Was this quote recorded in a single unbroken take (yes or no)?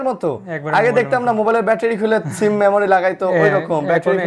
yes